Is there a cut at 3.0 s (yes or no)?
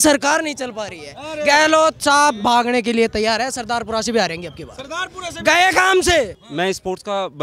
no